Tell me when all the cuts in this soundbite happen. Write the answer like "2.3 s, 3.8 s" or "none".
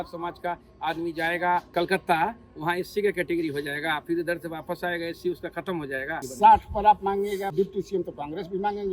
1.7 s, 6.3 s